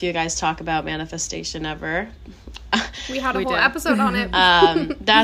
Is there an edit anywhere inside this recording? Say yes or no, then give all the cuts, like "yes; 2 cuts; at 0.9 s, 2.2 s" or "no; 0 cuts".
no; 0 cuts